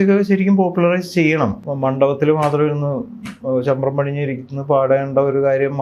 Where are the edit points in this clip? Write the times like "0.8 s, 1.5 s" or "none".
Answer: 1.6 s